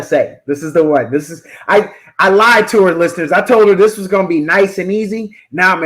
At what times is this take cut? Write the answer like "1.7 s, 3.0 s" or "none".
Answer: none